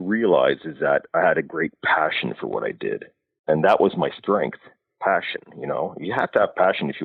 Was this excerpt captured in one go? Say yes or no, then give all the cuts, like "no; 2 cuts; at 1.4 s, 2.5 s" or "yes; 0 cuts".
yes; 0 cuts